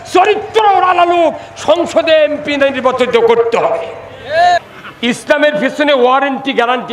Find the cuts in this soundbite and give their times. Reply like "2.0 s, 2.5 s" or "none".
4.6 s